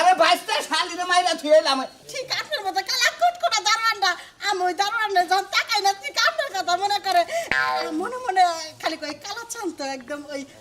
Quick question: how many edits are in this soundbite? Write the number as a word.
one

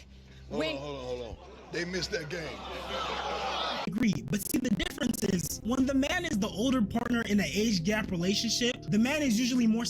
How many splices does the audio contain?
one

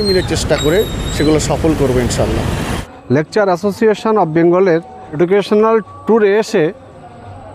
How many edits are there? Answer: zero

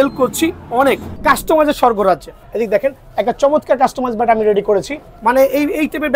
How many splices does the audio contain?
three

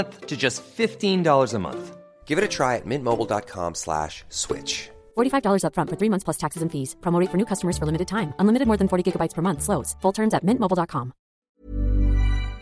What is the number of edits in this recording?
one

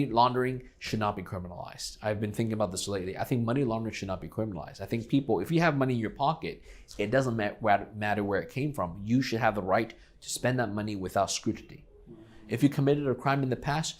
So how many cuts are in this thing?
zero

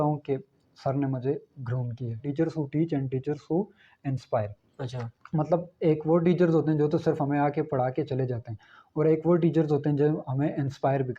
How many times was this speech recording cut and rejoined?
one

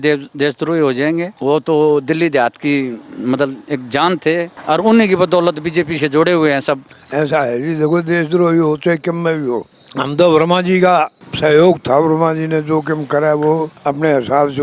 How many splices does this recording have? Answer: six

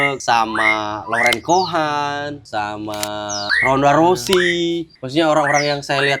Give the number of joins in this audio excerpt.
zero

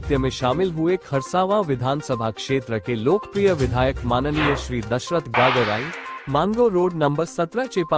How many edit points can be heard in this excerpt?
one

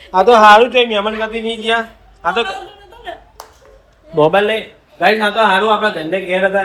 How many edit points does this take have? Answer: zero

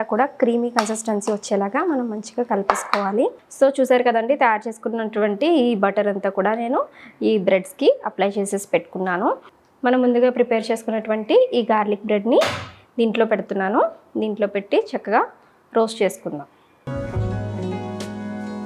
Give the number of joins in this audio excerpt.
two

